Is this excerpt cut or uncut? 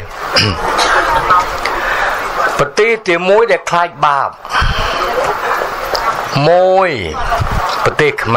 uncut